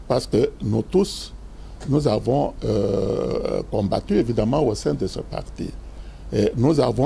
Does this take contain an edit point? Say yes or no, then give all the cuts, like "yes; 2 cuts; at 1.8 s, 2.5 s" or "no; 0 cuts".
no; 0 cuts